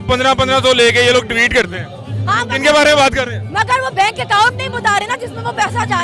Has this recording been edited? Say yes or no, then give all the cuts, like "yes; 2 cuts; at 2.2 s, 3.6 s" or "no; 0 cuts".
no; 0 cuts